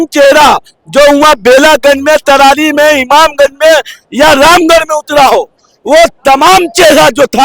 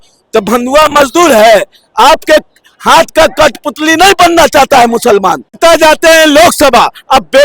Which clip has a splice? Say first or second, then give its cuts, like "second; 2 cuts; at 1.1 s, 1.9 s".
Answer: second; 1 cut; at 5.5 s